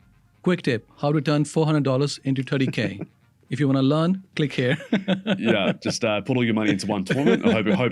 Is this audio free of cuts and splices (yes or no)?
yes